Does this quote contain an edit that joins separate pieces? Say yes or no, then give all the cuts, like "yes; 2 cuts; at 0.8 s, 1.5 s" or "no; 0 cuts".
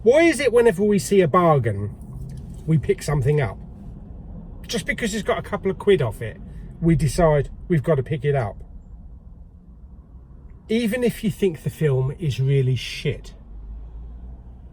no; 0 cuts